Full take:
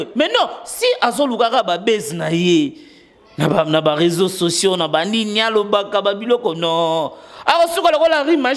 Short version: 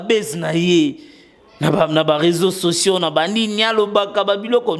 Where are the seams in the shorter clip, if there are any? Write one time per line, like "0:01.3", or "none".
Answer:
none